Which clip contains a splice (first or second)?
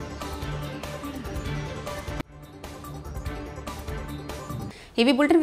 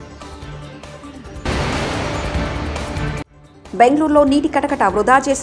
second